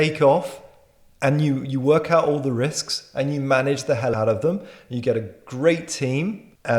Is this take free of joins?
no; 1 cut; at 4.1 s

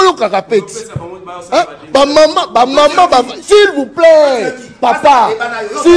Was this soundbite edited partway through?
no; 0 cuts

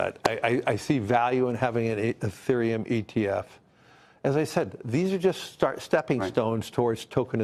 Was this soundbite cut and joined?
no; 0 cuts

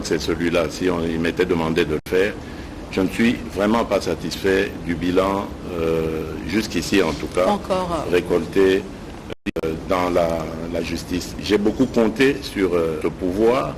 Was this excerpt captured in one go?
yes; 0 cuts

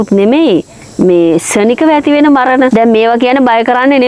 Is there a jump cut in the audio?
yes; 1 cut; at 2.7 s

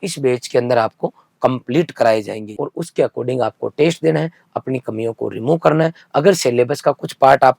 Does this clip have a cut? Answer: yes; 1 cut; at 2.5 s

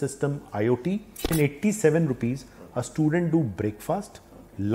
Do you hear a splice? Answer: yes; 1 cut; at 1.3 s

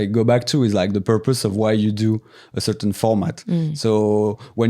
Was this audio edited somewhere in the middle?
no; 0 cuts

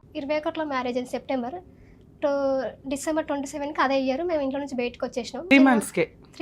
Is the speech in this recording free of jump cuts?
no; 1 cut; at 5.5 s

